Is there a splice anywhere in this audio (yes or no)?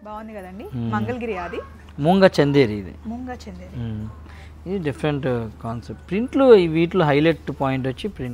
no